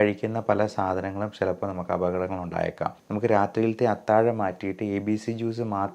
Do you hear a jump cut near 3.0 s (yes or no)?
yes